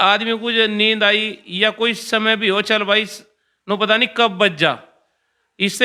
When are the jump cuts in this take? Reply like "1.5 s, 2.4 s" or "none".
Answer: none